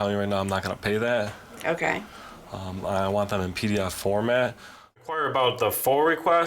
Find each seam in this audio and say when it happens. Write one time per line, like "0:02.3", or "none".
0:05.1